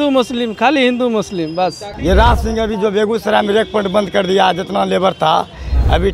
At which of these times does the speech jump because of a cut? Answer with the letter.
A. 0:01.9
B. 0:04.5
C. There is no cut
A